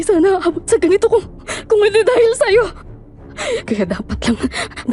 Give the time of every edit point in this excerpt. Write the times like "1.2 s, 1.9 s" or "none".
none